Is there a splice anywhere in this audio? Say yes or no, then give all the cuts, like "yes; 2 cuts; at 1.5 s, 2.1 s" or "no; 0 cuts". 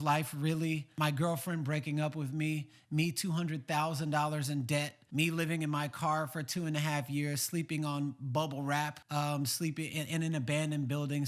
yes; 3 cuts; at 0.9 s, 5.0 s, 9.0 s